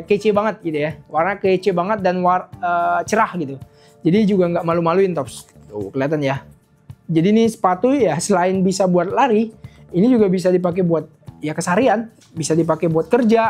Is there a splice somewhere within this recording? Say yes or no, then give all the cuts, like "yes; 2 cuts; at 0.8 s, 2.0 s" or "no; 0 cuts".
no; 0 cuts